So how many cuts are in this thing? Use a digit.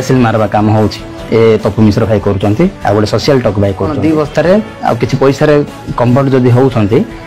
1